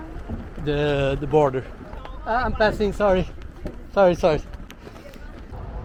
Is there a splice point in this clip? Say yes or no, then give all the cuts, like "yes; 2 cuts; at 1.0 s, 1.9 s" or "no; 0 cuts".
no; 0 cuts